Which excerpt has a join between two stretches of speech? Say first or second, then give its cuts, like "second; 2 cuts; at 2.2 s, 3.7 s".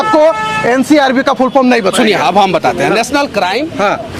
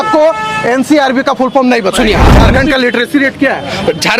second; 1 cut; at 2.3 s